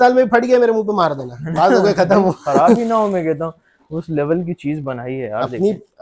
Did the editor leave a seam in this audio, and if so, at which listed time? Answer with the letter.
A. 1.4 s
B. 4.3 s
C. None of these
C